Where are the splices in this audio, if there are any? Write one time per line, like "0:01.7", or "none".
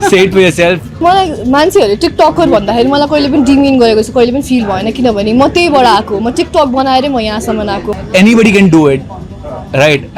0:01.0
0:07.9